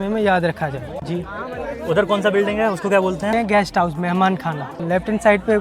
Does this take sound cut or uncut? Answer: cut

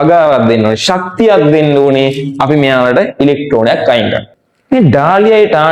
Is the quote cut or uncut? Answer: cut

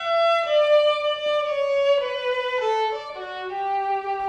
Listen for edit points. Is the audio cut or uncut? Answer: uncut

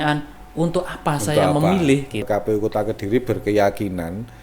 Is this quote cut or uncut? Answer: cut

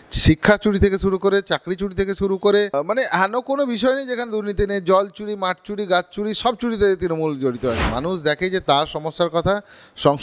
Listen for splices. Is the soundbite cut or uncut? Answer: cut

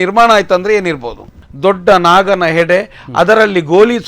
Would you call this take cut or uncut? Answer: cut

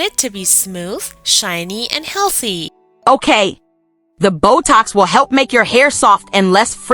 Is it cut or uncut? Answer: cut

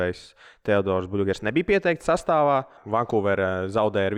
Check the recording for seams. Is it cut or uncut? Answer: cut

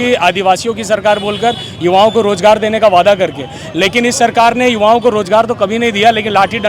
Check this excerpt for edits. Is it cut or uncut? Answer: uncut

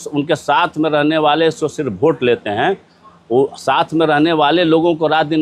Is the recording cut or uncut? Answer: uncut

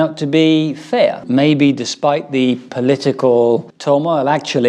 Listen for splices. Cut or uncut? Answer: cut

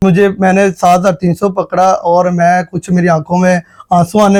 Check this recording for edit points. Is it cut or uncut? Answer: uncut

